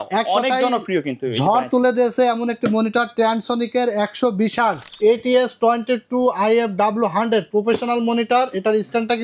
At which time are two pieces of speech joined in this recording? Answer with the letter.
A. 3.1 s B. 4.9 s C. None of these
B